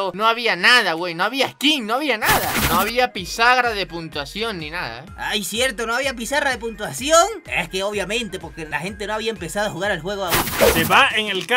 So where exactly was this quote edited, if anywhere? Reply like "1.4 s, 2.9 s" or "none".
2.6 s, 10.5 s